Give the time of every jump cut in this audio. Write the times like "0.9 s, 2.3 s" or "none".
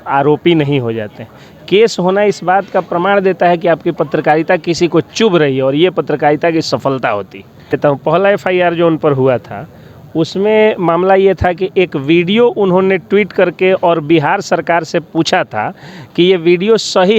7.8 s